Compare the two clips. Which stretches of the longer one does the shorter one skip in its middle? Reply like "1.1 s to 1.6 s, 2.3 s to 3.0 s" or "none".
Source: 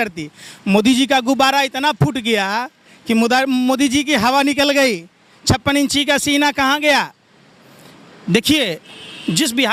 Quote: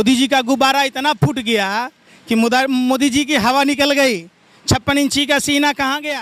none